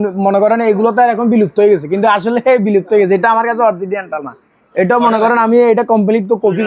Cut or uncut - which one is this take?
uncut